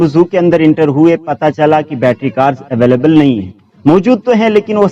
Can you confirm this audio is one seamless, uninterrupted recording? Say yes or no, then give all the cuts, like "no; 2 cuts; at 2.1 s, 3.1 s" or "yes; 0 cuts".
yes; 0 cuts